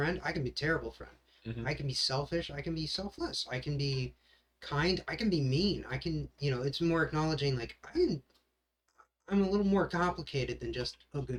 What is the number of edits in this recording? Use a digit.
0